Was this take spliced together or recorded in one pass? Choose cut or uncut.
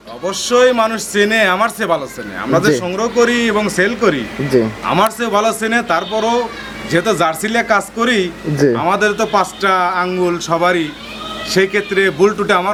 uncut